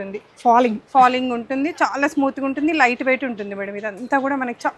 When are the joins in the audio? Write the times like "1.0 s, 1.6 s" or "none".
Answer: none

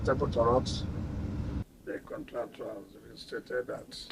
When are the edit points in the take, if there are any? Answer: 1.6 s

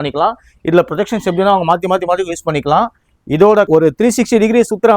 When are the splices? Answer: 3.7 s

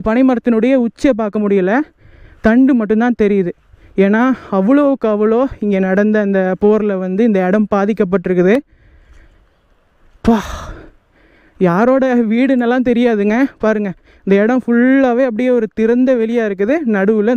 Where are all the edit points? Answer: none

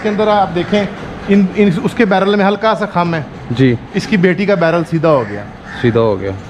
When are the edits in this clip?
none

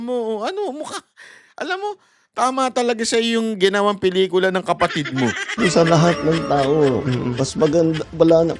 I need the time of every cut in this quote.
5.6 s

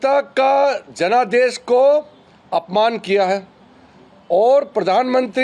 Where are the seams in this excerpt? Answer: none

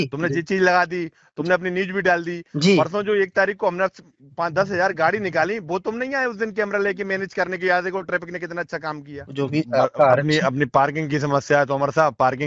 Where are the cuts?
9.2 s

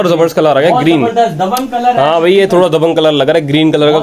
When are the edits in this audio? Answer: none

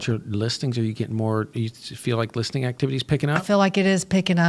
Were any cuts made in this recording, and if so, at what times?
none

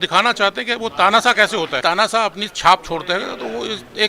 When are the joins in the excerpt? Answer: 1.8 s

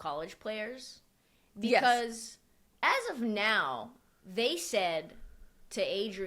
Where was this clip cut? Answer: none

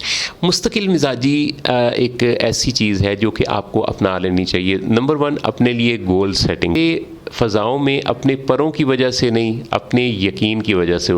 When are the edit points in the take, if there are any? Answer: 6.8 s

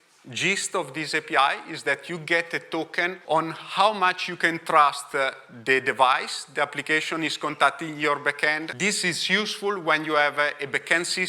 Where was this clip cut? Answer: 3.2 s, 8.7 s

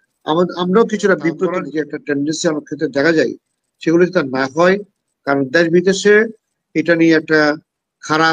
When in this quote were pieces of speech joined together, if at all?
1.7 s

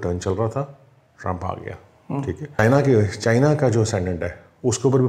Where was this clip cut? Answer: 2.6 s

